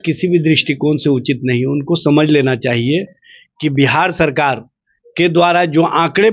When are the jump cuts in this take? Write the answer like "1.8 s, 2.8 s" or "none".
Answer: none